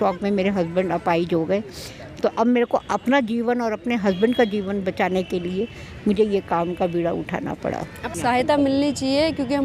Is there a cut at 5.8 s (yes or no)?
no